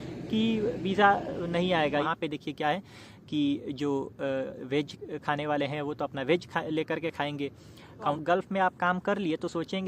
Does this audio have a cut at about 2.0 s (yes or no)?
yes